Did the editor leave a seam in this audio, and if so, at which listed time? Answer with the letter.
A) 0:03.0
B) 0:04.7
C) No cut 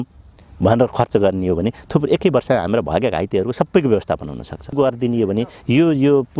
B